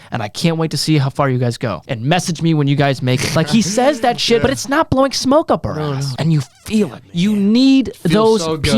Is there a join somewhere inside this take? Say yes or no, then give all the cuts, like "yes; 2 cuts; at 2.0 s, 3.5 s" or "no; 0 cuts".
yes; 5 cuts; at 1.9 s, 3.3 s, 4.4 s, 6.1 s, 7.0 s